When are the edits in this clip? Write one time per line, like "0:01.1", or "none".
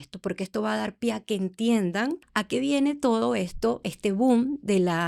0:02.3